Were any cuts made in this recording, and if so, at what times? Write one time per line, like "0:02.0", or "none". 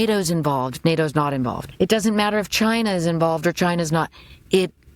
0:01.6